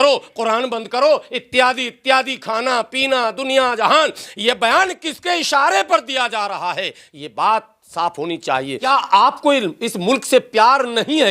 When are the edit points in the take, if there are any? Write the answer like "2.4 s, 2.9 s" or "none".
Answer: 8.9 s